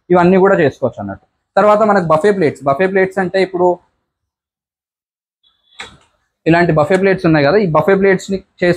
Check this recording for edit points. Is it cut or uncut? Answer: uncut